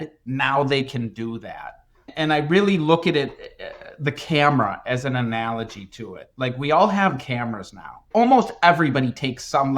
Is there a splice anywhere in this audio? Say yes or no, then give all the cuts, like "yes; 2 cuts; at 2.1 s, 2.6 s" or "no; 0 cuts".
yes; 1 cut; at 8.1 s